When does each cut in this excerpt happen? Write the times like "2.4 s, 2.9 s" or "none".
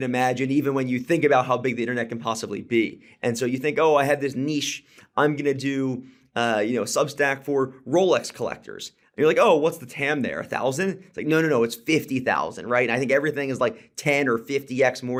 none